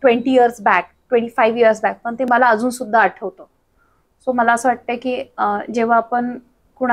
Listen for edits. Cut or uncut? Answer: uncut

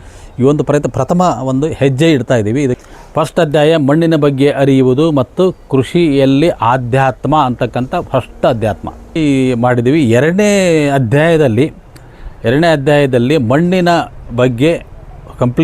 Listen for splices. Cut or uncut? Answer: cut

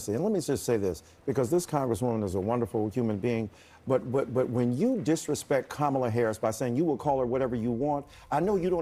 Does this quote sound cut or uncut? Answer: uncut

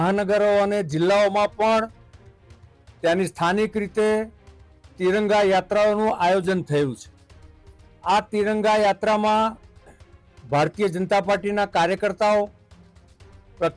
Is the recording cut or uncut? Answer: uncut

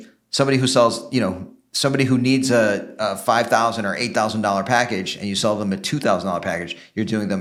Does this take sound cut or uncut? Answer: uncut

